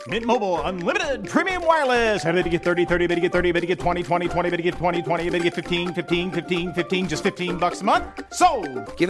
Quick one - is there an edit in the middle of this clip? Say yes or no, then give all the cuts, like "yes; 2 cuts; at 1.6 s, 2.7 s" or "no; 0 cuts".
no; 0 cuts